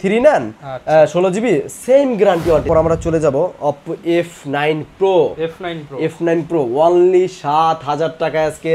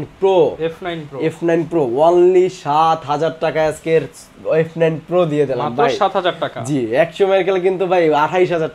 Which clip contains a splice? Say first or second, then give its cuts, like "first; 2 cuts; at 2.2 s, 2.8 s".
first; 1 cut; at 2.6 s